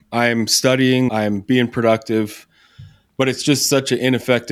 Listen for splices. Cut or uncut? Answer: cut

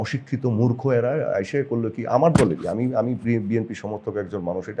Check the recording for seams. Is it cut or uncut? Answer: uncut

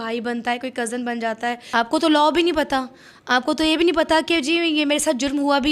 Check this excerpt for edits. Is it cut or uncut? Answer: cut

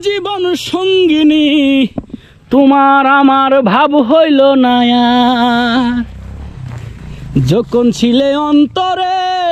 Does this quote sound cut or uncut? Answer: uncut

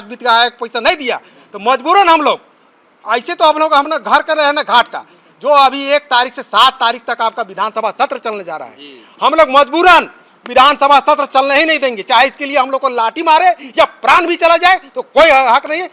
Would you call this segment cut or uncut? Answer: uncut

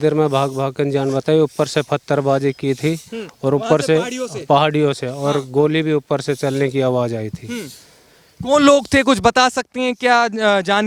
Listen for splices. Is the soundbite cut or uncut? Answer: uncut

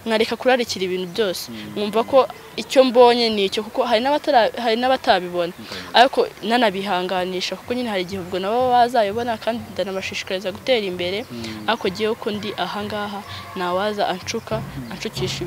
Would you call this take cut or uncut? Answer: uncut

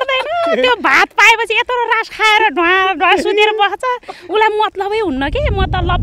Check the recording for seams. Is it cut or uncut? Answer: uncut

